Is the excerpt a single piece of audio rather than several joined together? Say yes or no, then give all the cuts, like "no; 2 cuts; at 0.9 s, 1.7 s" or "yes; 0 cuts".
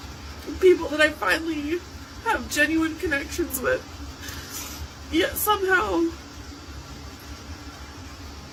yes; 0 cuts